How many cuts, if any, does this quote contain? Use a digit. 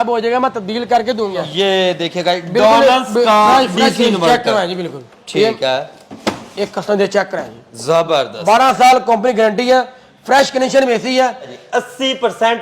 2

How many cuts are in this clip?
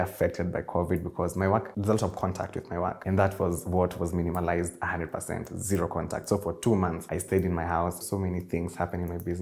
4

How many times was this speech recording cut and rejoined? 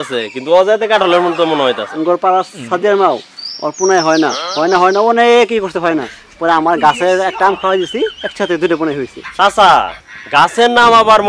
2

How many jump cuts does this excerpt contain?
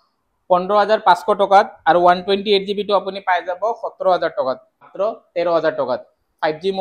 1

